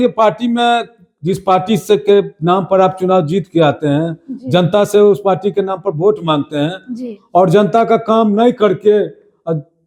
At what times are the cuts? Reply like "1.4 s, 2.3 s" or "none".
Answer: none